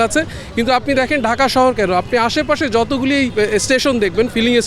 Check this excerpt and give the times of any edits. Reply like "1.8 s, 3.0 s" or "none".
3.3 s